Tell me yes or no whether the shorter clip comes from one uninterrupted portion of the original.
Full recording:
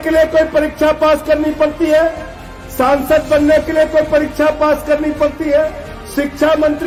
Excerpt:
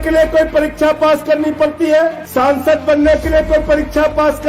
no